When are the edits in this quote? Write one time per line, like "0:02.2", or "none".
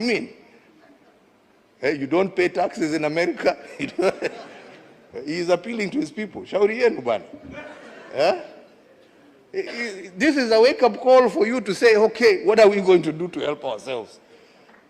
0:14.0